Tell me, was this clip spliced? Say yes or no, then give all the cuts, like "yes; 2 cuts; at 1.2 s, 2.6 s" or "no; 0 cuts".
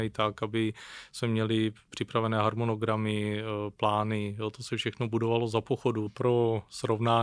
yes; 1 cut; at 6.1 s